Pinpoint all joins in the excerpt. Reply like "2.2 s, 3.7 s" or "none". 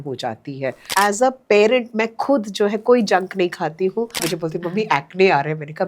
0.9 s, 4.2 s